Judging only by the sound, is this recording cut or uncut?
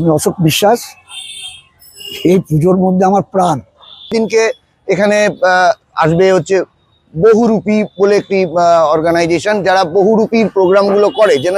cut